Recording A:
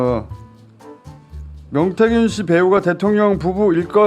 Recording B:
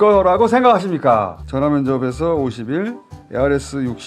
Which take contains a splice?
B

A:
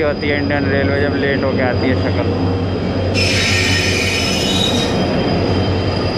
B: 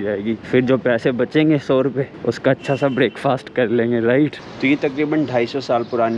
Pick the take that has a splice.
B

